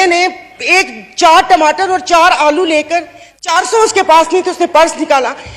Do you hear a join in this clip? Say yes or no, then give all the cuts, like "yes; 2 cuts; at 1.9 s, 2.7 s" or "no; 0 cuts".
no; 0 cuts